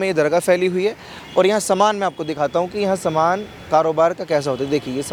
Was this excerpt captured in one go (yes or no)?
yes